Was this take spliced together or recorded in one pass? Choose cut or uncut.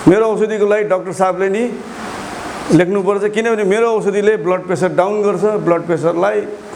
uncut